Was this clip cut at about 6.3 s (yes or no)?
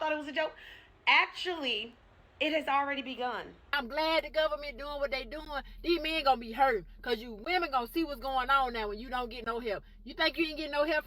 no